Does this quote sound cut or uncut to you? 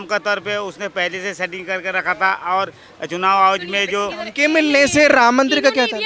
uncut